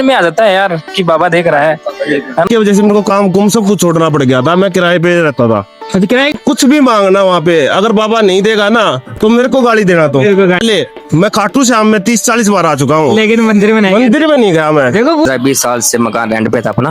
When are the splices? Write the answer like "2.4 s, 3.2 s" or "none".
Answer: 2.5 s, 6.3 s, 10.6 s, 15.3 s